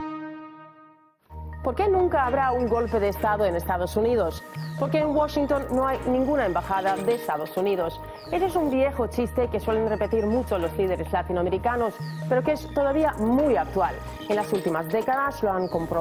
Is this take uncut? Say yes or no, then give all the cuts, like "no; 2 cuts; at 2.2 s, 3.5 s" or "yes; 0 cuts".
yes; 0 cuts